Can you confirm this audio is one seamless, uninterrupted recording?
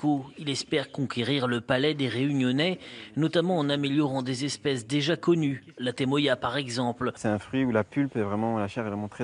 no; 1 cut; at 7.2 s

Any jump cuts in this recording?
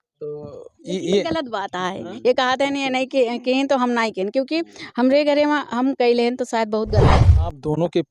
yes; 1 cut; at 7.1 s

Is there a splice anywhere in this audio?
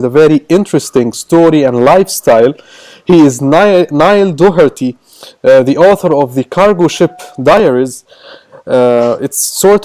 yes; 1 cut; at 8.7 s

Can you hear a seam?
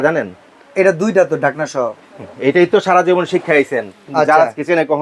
no; 0 cuts

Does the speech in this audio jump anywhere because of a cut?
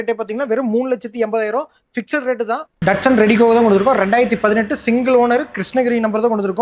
yes; 1 cut; at 2.8 s

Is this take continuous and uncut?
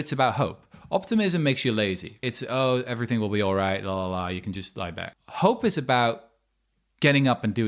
no; 1 cut; at 2.2 s

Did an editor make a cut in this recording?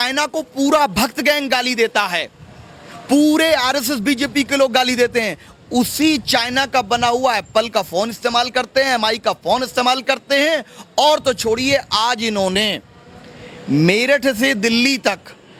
no; 0 cuts

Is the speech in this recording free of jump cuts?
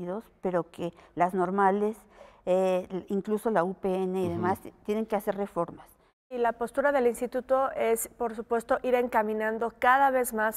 no; 1 cut; at 6.4 s

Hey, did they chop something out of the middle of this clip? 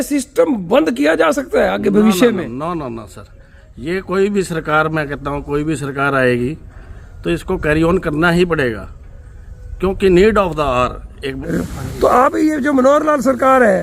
yes; 1 cut; at 11.4 s

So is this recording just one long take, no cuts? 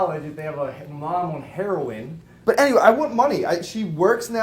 no; 1 cut; at 2.3 s

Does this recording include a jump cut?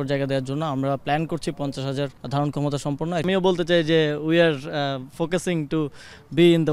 yes; 2 cuts; at 2.2 s, 3.2 s

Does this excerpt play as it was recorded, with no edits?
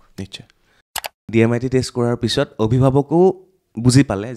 no; 1 cut; at 1.2 s

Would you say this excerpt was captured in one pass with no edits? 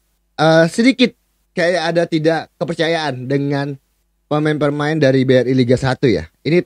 yes; 0 cuts

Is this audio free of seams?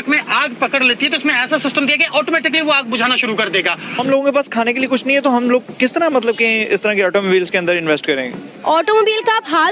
no; 1 cut; at 4.0 s

